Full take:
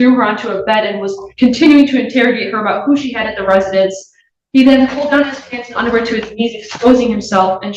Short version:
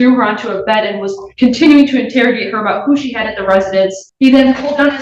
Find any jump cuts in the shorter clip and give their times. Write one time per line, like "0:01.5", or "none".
0:04.0

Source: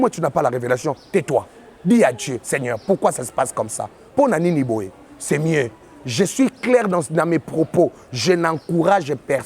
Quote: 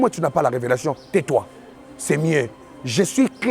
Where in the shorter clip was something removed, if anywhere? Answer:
0:01.7

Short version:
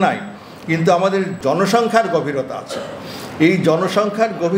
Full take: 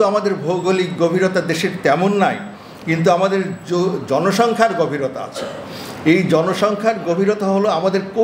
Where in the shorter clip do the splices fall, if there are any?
0:01.4

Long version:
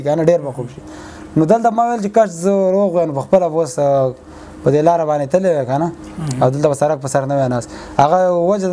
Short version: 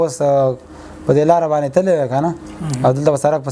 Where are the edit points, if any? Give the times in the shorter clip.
none

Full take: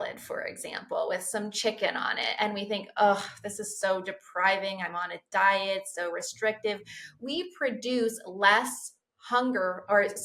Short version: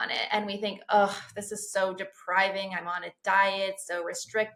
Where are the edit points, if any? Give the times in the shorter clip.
none

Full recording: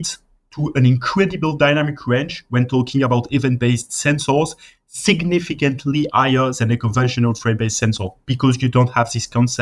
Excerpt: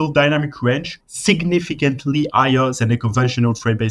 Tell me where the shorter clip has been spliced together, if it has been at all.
0:00.9

